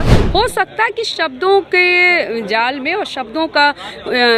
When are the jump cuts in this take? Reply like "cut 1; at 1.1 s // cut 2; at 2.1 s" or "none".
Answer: none

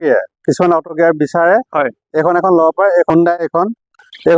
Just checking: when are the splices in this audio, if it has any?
cut 1; at 3.1 s

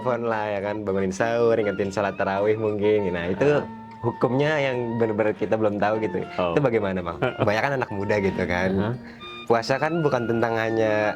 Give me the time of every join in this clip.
cut 1; at 7.4 s

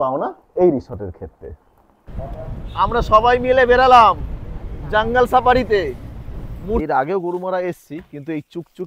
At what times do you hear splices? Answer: cut 1; at 6.8 s

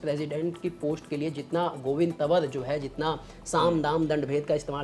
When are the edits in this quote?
none

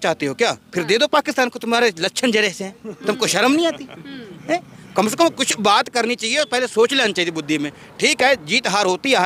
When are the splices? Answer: none

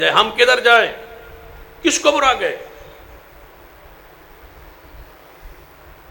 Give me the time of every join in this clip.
none

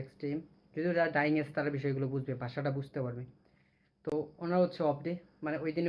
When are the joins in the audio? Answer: none

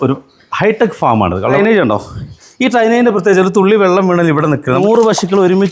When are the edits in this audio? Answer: cut 1; at 1.6 s // cut 2; at 4.8 s

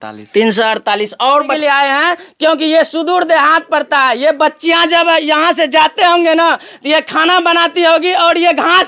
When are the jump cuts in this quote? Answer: cut 1; at 1.5 s

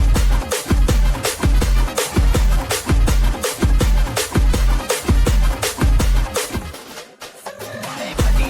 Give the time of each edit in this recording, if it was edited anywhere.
cut 1; at 2.5 s

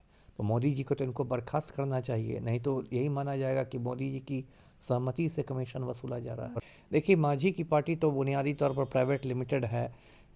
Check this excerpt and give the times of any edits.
cut 1; at 6.6 s

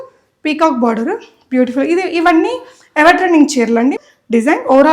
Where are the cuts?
cut 1; at 4.0 s

